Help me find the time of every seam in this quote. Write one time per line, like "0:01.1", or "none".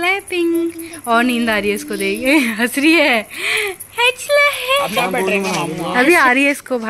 0:04.9